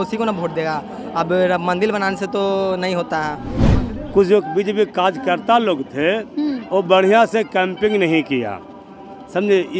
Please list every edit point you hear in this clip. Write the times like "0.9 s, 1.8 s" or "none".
3.7 s